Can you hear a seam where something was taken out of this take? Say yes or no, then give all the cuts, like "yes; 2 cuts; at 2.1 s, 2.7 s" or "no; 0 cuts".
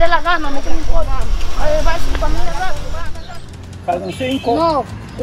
yes; 1 cut; at 3.1 s